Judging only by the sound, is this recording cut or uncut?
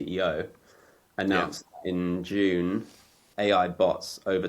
cut